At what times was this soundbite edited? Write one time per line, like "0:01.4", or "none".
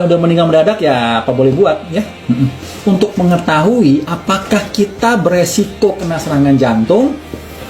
0:02.8
0:03.8